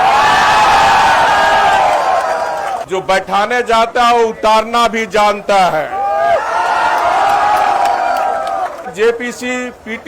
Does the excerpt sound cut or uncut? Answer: cut